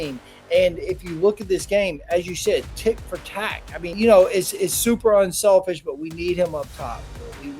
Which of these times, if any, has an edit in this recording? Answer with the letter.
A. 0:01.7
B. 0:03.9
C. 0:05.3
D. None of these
B